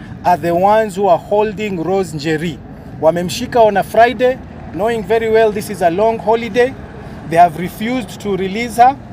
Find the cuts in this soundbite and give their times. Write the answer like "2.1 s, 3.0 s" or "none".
none